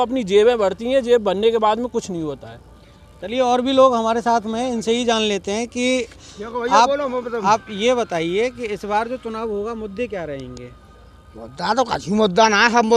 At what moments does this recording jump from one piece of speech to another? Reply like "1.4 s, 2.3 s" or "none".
none